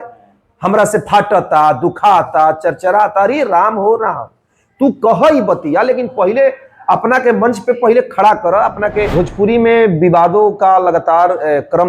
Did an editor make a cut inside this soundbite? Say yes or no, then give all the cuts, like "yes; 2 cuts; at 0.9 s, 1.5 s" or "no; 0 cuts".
yes; 1 cut; at 9.2 s